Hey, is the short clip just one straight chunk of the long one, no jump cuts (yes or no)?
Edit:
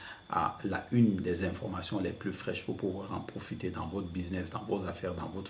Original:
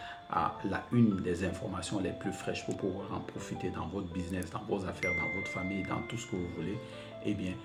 yes